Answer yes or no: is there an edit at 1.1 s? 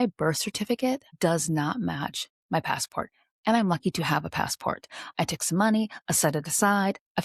yes